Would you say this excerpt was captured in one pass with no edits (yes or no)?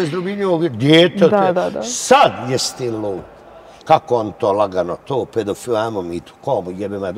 no